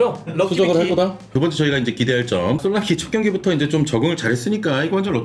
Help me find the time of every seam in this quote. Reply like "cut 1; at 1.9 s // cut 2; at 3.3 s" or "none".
cut 1; at 1.3 s // cut 2; at 2.6 s

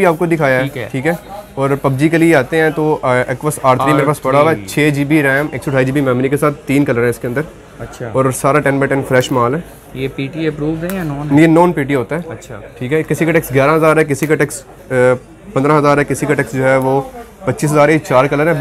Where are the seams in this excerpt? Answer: none

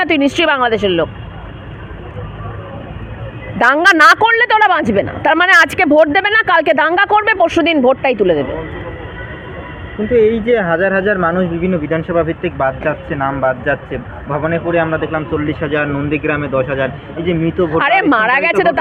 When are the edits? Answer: none

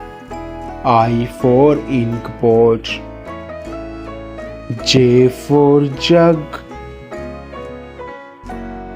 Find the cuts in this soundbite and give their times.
none

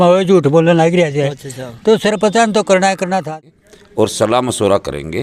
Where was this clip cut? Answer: cut 1; at 3.2 s

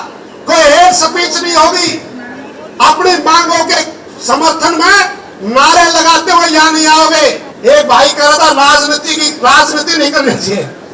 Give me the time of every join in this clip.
cut 1; at 7.5 s

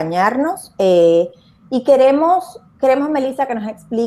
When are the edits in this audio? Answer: cut 1; at 1.8 s

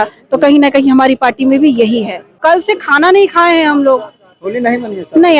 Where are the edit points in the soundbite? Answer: cut 1; at 2.3 s

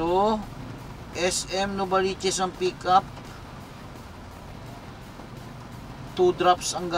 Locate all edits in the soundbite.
none

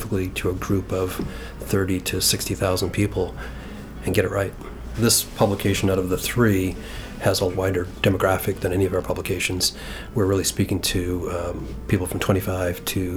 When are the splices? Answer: cut 1; at 4.9 s // cut 2; at 7.6 s

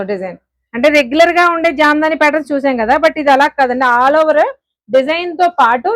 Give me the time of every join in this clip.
none

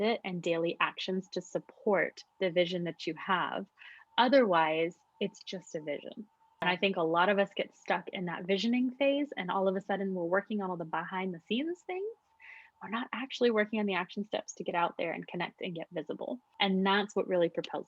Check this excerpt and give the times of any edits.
cut 1; at 6.6 s // cut 2; at 16.5 s

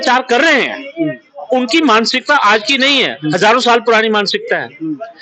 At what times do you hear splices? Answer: none

